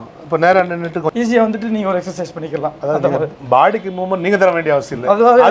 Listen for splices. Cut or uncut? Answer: cut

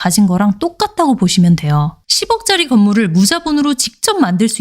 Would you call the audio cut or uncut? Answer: cut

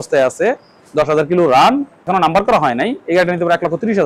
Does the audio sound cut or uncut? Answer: cut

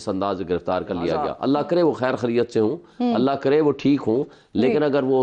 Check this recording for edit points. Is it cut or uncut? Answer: cut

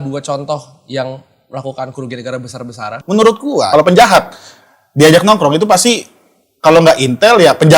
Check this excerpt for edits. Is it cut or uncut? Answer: cut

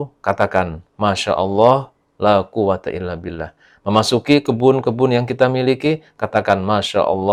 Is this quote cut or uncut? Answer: uncut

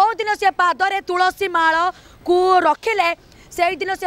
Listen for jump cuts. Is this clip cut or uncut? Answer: uncut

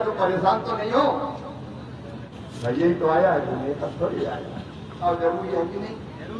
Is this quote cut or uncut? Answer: cut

